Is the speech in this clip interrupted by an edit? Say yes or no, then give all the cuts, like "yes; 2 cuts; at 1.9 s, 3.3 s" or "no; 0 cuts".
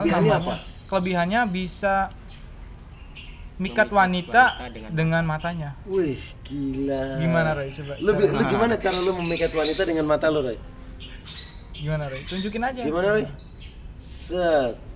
no; 0 cuts